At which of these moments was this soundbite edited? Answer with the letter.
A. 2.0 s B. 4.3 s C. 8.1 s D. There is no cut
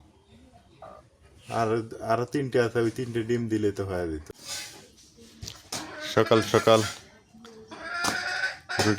B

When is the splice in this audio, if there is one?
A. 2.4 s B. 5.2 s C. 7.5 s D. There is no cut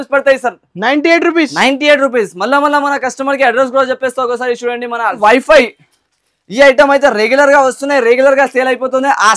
B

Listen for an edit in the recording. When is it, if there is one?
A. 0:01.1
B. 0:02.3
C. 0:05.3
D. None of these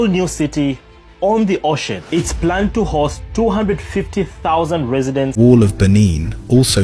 C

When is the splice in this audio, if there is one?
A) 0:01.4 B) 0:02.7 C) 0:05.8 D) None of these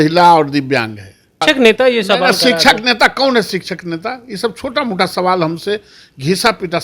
A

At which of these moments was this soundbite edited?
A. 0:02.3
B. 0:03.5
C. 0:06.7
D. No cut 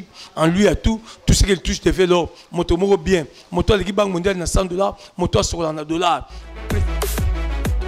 C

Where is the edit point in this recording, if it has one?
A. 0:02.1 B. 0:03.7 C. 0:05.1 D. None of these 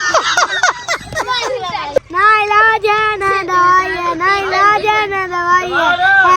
A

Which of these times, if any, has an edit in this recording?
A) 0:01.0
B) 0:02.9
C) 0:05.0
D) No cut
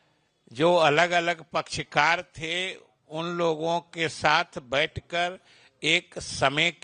D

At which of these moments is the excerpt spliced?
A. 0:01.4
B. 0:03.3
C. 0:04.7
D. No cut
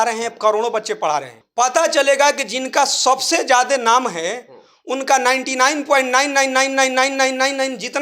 A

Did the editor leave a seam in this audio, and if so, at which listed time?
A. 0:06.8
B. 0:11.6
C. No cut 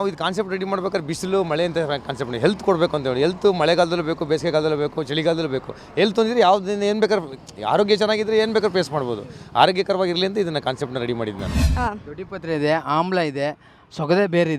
B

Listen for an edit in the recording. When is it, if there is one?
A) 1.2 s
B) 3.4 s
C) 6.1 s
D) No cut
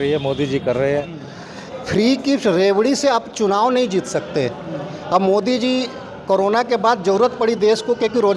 A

